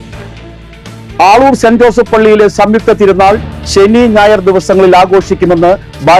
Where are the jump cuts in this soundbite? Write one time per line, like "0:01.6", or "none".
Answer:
0:00.9

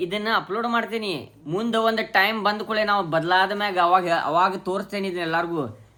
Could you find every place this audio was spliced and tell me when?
none

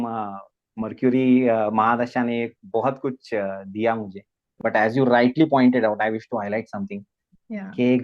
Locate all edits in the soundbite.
0:04.6

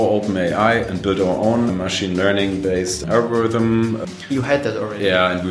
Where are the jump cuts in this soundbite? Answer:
0:01.7
0:03.0
0:04.0

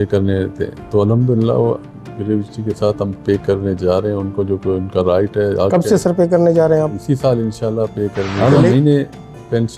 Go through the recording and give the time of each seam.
0:08.3

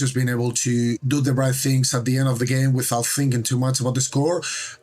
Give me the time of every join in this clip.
0:01.0

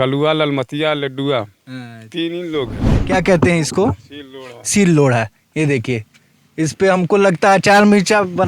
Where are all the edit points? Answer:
0:03.0

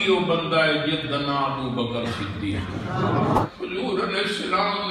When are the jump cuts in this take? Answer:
0:03.4

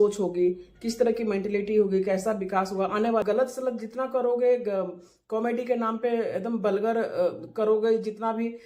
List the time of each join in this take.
0:03.2

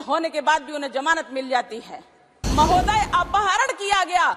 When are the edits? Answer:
0:02.3

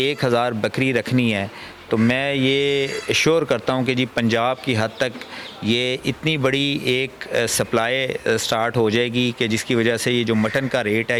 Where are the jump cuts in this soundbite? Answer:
none

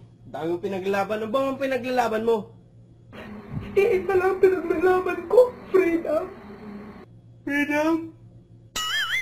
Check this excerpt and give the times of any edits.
0:02.3

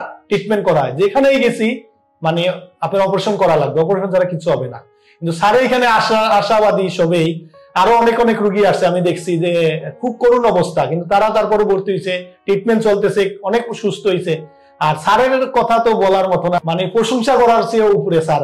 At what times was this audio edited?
0:16.6

